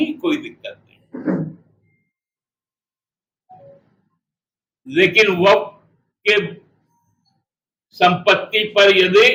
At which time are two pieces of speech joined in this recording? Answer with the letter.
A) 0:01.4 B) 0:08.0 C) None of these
C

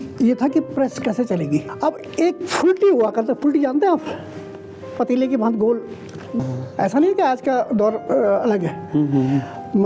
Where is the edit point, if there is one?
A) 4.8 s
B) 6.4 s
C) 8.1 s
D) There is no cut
B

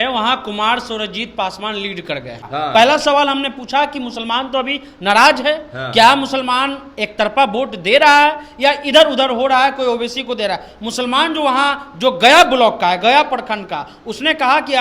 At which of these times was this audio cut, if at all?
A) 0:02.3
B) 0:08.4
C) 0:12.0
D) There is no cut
A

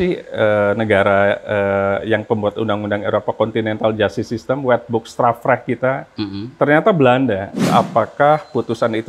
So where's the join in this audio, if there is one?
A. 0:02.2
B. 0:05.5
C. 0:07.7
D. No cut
C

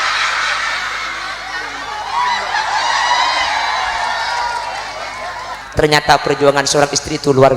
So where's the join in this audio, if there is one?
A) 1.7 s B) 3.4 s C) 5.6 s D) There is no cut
C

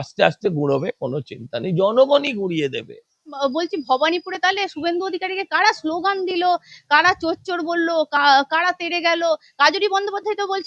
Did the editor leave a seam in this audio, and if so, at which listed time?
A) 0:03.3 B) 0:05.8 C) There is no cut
A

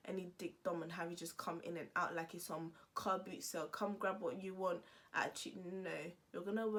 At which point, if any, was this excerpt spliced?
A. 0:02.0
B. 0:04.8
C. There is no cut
C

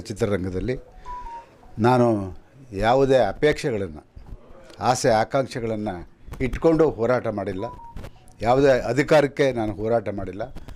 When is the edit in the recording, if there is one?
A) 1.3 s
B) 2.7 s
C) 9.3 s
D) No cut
D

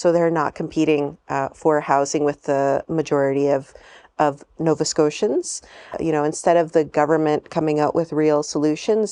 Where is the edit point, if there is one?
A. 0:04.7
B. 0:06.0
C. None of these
B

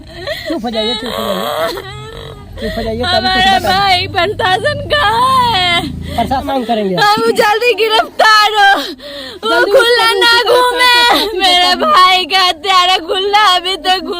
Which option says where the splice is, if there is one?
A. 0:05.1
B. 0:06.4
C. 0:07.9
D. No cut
B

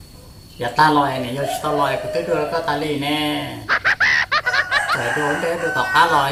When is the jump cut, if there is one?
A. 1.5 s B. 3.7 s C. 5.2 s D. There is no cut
D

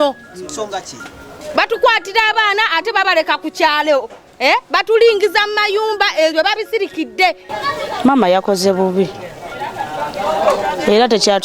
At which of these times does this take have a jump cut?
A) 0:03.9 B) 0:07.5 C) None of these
B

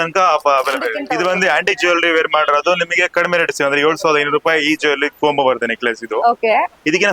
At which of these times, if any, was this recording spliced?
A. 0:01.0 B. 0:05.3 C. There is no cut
A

